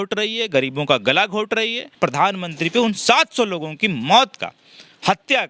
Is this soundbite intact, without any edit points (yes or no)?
no